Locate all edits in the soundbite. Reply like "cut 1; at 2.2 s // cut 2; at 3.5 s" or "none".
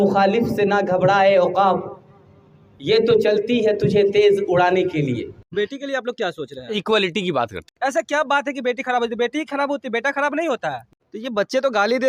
cut 1; at 5.4 s // cut 2; at 7.6 s // cut 3; at 10.9 s